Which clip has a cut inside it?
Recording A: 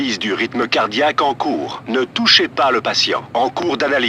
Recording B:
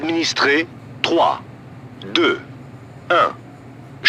A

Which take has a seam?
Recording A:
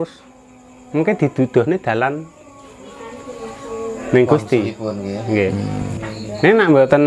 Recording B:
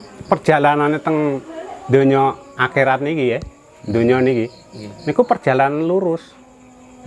A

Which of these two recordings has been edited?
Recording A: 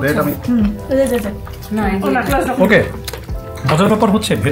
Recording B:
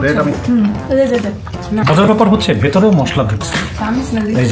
B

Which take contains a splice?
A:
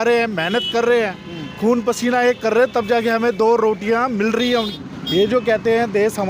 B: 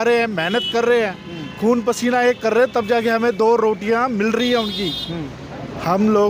A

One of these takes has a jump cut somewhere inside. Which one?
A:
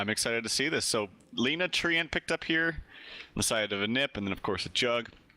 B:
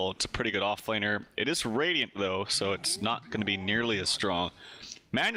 A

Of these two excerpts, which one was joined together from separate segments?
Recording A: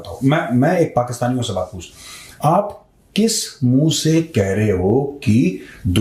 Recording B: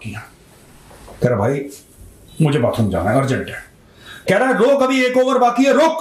B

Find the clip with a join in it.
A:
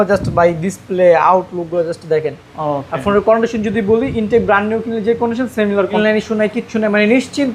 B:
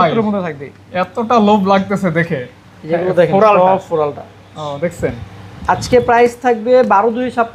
A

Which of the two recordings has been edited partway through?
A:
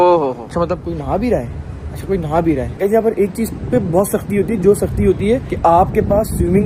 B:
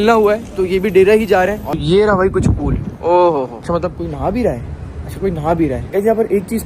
B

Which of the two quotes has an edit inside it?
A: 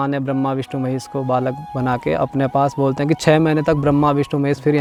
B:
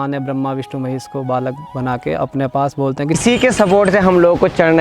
B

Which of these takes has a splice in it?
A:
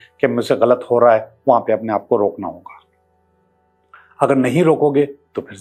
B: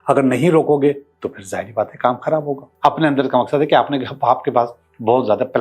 B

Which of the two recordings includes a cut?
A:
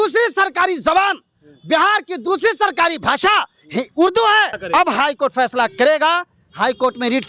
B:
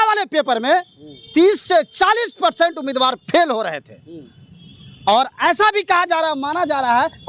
A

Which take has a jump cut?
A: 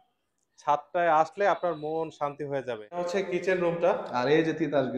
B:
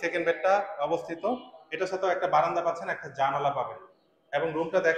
A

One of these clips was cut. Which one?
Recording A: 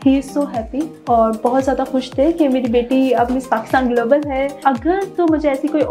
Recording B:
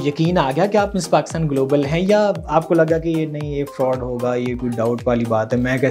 A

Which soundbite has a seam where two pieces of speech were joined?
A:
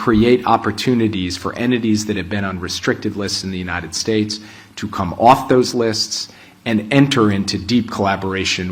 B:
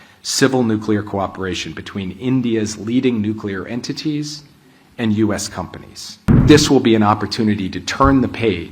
B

